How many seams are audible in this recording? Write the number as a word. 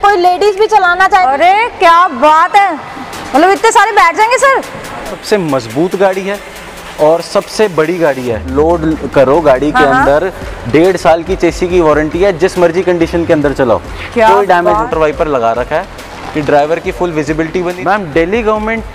five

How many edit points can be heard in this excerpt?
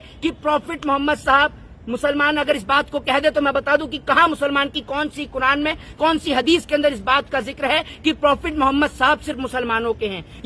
zero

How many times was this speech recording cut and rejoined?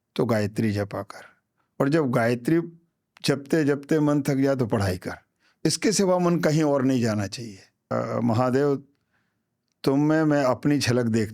one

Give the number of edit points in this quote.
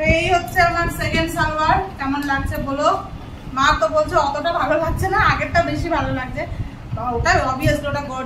zero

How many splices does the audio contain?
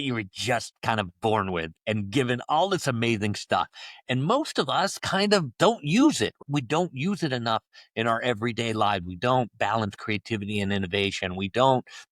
zero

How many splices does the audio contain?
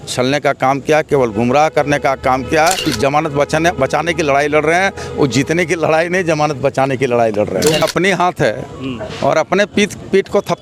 two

